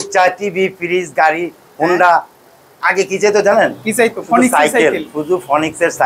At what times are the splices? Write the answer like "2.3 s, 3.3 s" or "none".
none